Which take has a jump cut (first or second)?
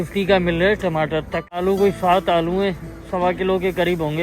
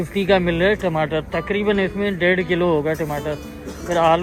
first